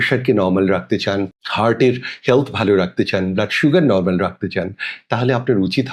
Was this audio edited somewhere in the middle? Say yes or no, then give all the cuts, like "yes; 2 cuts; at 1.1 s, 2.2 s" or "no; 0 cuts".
no; 0 cuts